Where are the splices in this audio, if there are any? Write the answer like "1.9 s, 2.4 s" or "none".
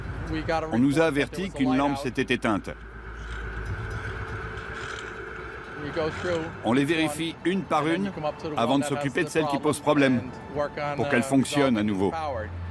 2.0 s